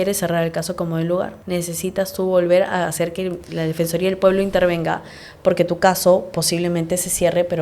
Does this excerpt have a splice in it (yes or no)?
yes